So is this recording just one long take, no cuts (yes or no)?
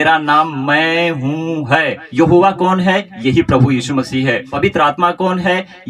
no